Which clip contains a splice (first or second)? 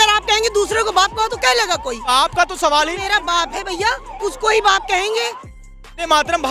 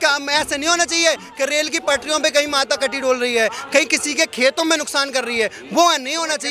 first